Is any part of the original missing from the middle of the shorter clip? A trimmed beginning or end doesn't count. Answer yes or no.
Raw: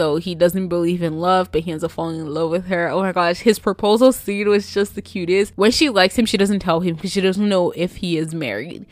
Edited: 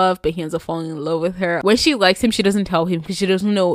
yes